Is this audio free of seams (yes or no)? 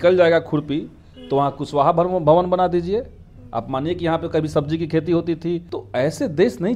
no